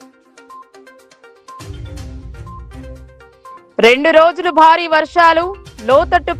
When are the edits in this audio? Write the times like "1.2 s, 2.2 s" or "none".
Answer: 1.1 s